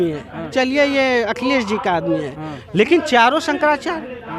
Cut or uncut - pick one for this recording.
uncut